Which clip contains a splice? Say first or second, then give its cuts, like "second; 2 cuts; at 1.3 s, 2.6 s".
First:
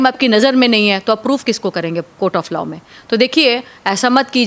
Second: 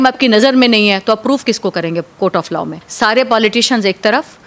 second; 1 cut; at 2.8 s